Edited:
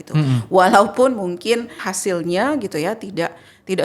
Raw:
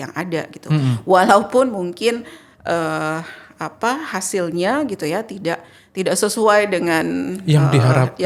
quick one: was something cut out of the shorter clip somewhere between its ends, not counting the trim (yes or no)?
yes